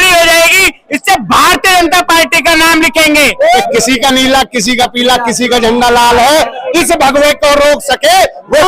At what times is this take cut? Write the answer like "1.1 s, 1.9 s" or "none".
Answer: 3.6 s